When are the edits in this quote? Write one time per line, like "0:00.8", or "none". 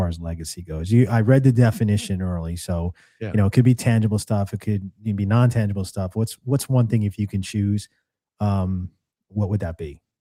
none